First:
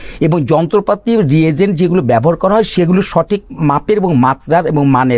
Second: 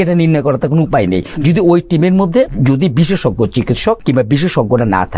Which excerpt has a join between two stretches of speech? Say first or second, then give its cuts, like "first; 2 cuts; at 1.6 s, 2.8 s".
second; 2 cuts; at 2.5 s, 4.0 s